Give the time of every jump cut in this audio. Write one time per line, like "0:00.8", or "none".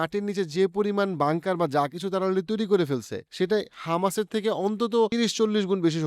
0:05.1

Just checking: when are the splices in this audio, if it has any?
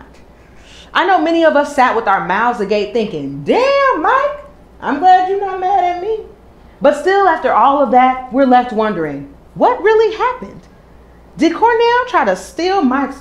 0:02.1

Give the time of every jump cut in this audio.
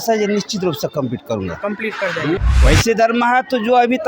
0:02.4

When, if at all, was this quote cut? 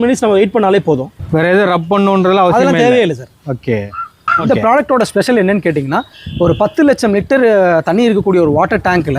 0:01.1
0:04.3

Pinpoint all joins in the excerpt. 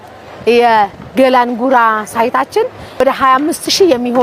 0:03.0

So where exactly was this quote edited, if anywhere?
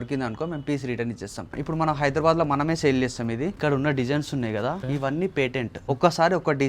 0:01.6
0:03.6
0:04.8
0:05.8

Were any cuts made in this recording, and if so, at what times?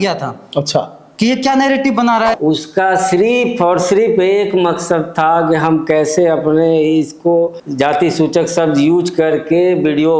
0:02.3
0:07.6

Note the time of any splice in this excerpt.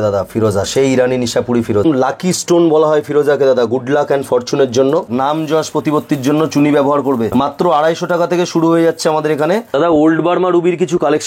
0:01.9
0:05.1
0:07.3
0:09.7

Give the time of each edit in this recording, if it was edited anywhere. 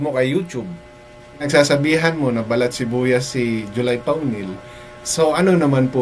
0:01.5

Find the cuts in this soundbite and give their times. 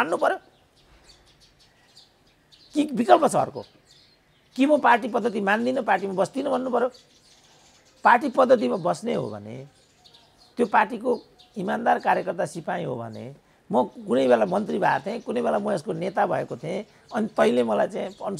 none

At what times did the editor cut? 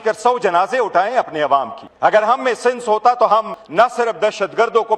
0:01.8
0:03.6

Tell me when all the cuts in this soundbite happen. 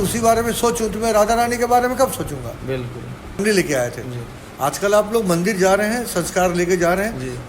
0:03.4

